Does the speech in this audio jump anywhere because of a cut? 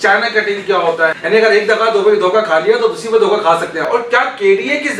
yes; 2 cuts; at 1.2 s, 3.8 s

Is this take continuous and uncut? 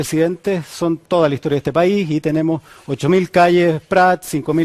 no; 1 cut; at 2.8 s

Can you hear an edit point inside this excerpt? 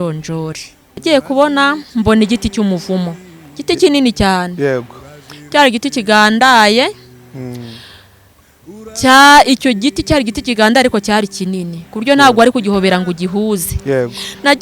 yes; 1 cut; at 1.0 s

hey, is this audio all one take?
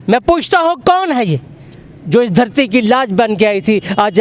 yes; 0 cuts

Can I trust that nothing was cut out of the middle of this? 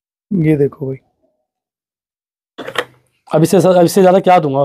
yes; 0 cuts

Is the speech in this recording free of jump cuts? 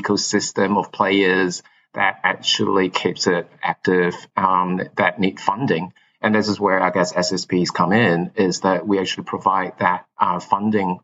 yes; 0 cuts

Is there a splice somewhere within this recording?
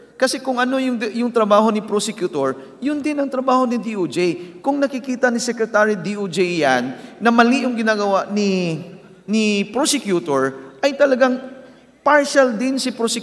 no; 0 cuts

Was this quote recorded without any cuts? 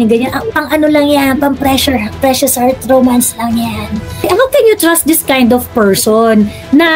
no; 1 cut; at 4.1 s

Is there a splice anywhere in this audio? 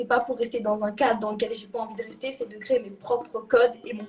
no; 0 cuts

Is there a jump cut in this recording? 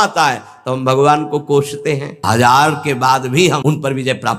yes; 2 cuts; at 2.2 s, 3.6 s

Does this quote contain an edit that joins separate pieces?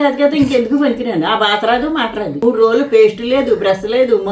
yes; 1 cut; at 2.4 s

